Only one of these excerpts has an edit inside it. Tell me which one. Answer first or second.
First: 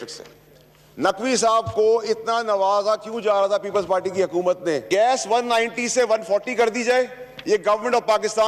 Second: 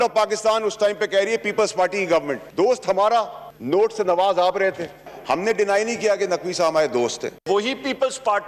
second